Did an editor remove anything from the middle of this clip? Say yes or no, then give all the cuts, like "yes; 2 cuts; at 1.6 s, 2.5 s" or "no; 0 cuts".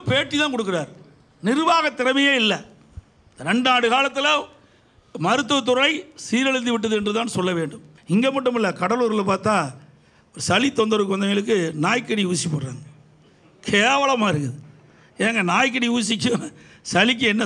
yes; 1 cut; at 7.9 s